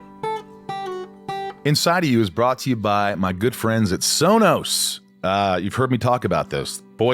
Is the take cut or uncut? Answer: cut